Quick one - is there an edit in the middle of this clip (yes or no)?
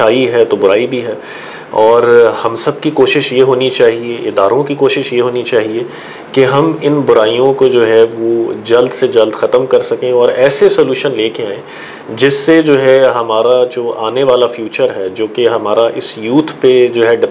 no